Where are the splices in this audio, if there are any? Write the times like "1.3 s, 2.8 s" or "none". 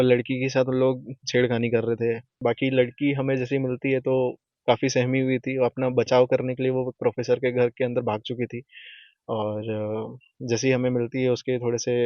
2.3 s